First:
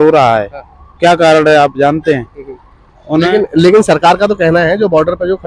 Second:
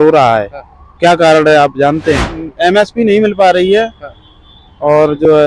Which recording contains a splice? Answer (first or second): second